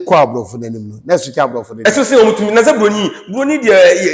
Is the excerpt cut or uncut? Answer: uncut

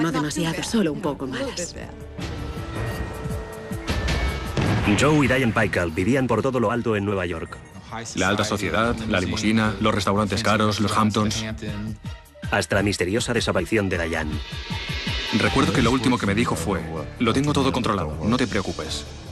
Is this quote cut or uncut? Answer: cut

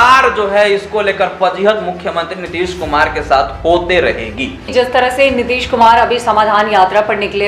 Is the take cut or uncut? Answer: cut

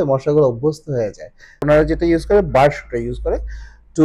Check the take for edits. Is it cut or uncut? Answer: cut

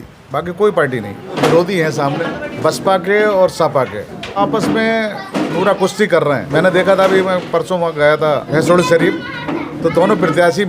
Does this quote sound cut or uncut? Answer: cut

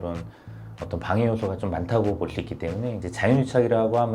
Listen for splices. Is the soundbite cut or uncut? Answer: cut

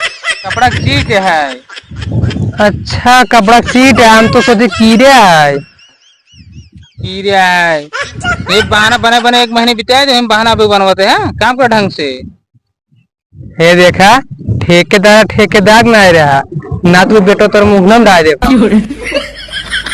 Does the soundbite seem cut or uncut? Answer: cut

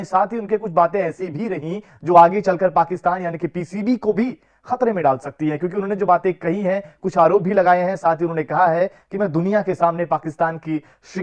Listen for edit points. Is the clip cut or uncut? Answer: uncut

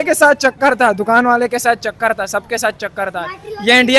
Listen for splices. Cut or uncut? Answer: uncut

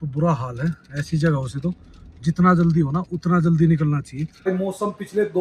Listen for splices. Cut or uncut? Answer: cut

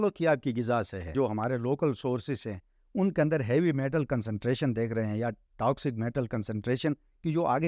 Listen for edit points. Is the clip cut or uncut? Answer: cut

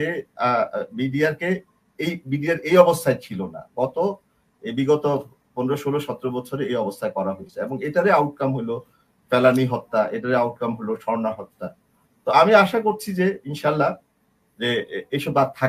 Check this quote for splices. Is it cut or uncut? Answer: uncut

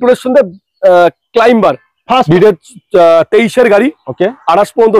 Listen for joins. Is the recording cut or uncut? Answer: cut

